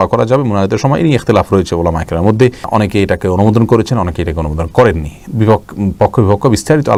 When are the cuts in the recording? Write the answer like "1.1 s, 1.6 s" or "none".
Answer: none

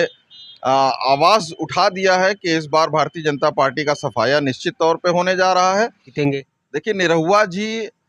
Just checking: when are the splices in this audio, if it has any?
6.0 s

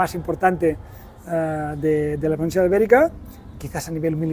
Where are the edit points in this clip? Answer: none

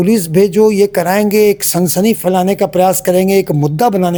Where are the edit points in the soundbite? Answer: none

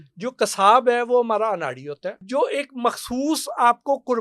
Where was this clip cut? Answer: 2.2 s

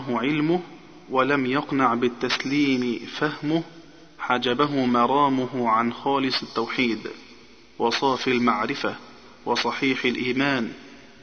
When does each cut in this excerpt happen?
none

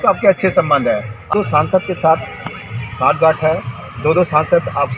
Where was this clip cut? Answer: 1.3 s

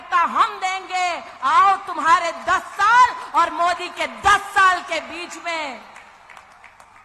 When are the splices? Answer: none

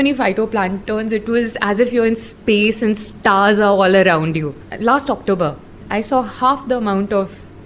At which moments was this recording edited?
4.6 s, 5.8 s

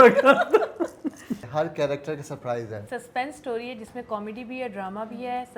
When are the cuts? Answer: 1.4 s, 2.8 s

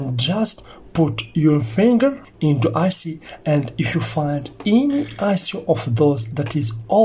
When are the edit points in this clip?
none

